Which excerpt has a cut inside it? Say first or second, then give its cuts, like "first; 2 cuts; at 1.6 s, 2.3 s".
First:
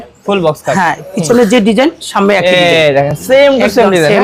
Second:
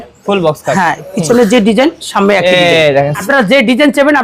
second; 1 cut; at 3.2 s